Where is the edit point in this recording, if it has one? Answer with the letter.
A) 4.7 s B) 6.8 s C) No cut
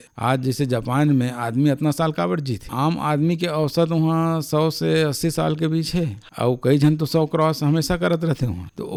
C